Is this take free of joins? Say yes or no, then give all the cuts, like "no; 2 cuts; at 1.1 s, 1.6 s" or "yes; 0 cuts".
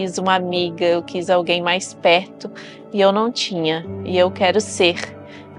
yes; 0 cuts